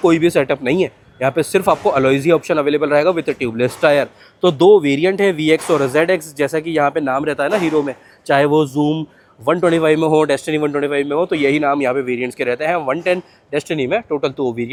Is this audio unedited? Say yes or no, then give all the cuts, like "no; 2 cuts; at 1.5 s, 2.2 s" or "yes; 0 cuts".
yes; 0 cuts